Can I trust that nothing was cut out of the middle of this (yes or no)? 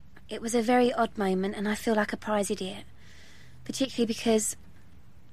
no